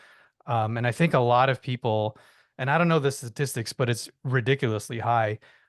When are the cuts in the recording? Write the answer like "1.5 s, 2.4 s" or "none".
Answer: none